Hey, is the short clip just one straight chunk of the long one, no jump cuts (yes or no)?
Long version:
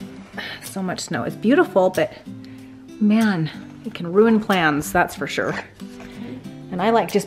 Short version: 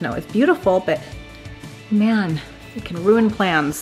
yes